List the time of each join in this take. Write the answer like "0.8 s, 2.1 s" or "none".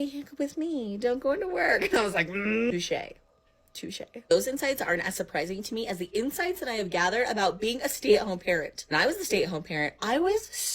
2.4 s

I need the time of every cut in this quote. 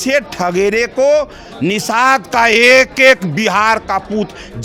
none

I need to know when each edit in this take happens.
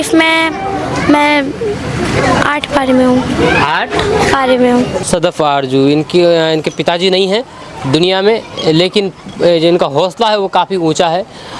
4.9 s

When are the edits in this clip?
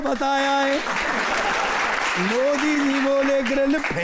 2.1 s

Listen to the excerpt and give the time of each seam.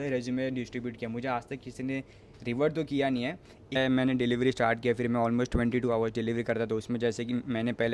3.8 s

